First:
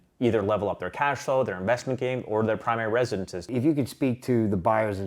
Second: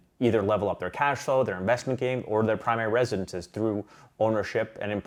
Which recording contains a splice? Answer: first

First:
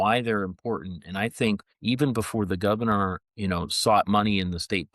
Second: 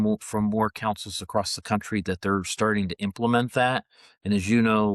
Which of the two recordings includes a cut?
first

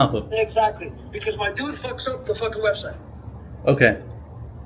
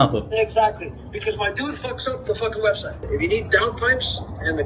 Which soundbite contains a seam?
second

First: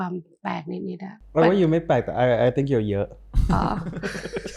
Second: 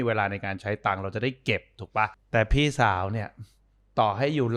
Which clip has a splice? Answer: second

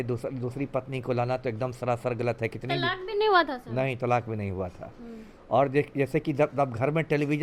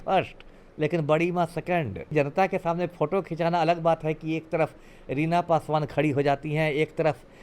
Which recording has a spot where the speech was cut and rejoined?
second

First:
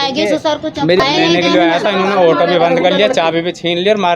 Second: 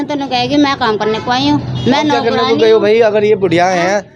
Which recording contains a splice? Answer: first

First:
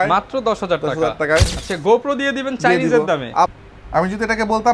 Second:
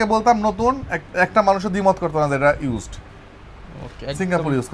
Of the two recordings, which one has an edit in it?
first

